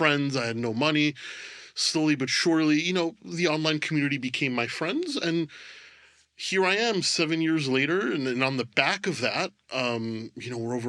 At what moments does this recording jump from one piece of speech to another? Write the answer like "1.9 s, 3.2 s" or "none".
none